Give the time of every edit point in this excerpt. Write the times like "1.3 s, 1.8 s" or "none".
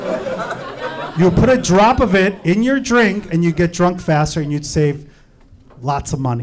none

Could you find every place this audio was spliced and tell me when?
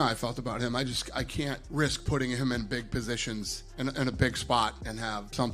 none

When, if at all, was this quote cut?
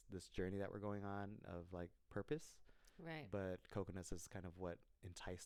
none

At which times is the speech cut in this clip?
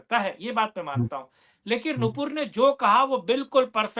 none

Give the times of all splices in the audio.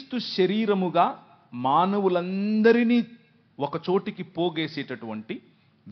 none

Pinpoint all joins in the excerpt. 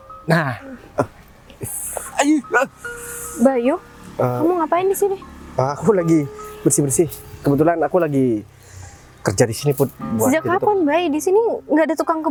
none

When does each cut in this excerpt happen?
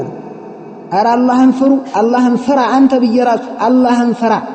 none

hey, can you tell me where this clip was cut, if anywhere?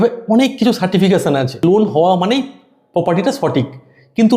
1.6 s

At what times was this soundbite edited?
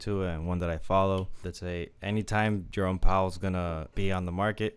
1.4 s, 2.7 s, 3.9 s

